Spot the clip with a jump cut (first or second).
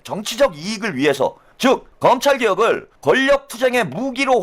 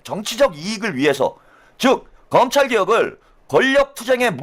first